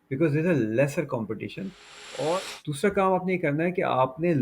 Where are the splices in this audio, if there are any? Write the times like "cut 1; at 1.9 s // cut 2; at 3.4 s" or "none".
cut 1; at 2.5 s